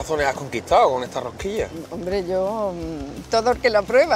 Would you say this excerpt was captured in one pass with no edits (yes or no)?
yes